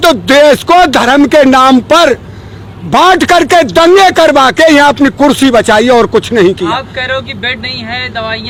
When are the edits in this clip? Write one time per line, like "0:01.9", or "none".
none